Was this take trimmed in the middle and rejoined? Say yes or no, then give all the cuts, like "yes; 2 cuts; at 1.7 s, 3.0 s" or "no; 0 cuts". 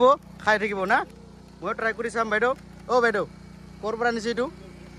no; 0 cuts